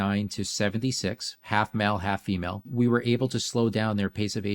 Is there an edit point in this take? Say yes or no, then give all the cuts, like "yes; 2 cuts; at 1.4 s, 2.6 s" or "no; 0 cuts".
yes; 2 cuts; at 1.3 s, 2.6 s